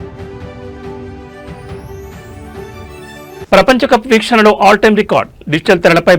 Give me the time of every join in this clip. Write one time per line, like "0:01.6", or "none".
0:02.8